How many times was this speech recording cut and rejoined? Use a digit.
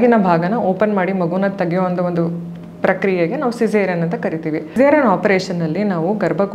1